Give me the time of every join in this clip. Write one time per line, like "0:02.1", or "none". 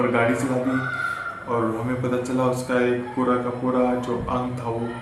none